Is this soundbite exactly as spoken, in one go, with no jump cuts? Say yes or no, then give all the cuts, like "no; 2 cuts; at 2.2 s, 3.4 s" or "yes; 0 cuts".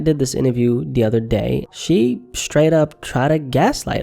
no; 1 cut; at 1.7 s